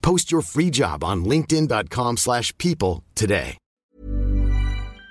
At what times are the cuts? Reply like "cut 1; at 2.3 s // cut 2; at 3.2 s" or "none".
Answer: cut 1; at 3.6 s